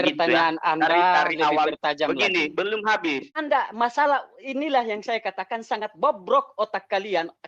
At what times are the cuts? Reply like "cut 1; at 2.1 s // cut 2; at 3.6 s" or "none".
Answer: cut 1; at 3.4 s